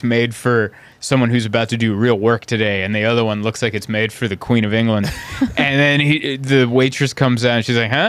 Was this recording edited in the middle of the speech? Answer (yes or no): no